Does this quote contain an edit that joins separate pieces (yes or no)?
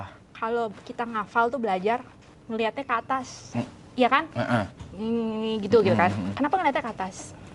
no